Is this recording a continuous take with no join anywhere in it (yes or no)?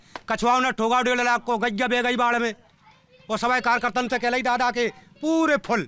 yes